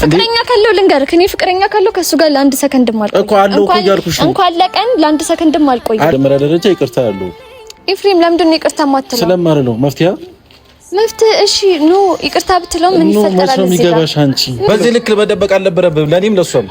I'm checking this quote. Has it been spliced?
yes; 2 cuts; at 6.1 s, 14.7 s

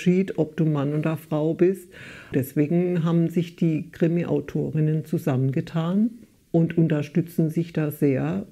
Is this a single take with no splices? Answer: no; 2 cuts; at 2.3 s, 6.3 s

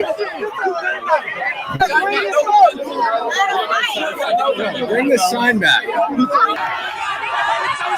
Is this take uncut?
no; 1 cut; at 6.6 s

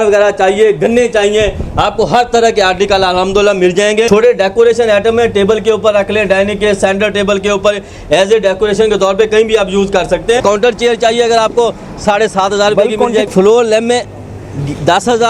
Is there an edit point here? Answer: yes; 3 cuts; at 4.1 s, 10.4 s, 13.3 s

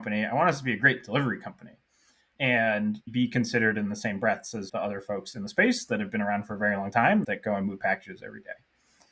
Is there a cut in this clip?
yes; 2 cuts; at 3.0 s, 7.2 s

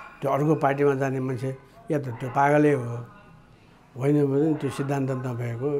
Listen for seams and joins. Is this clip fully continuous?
yes; 0 cuts

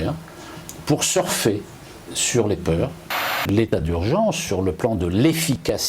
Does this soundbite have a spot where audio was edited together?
yes; 1 cut; at 3.2 s

